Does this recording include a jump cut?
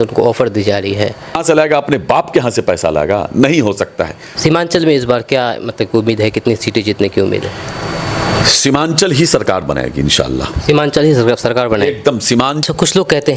yes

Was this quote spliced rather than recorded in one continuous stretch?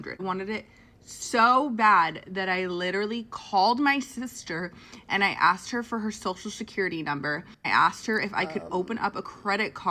no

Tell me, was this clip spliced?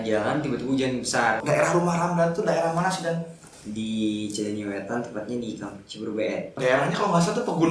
yes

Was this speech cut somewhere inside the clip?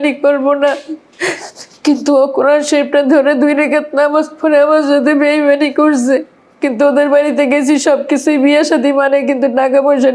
no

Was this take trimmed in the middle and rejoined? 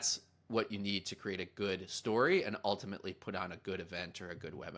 no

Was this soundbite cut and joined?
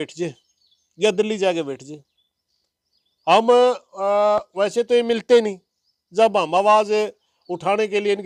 no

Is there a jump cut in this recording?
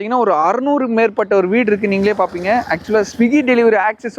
no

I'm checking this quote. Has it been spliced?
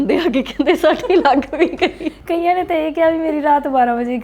no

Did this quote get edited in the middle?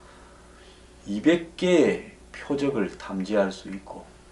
no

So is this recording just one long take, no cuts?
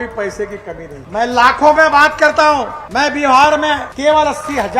no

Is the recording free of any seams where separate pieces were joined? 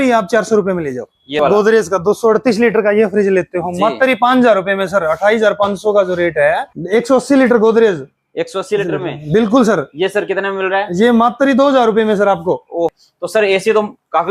no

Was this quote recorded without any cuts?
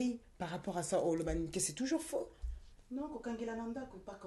yes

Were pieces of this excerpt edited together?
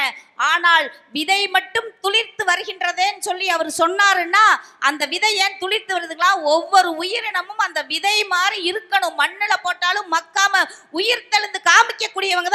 no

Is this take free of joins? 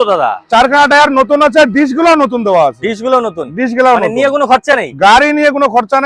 yes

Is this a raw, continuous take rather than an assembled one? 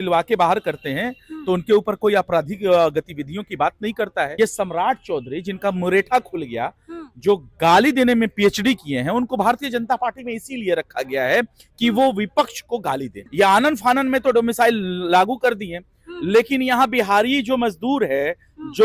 no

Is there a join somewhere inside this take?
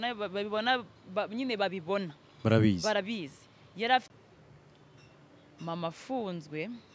yes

